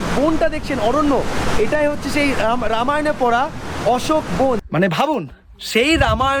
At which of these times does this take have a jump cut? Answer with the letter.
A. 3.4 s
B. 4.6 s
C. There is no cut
B